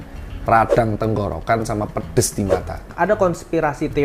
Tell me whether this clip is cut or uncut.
cut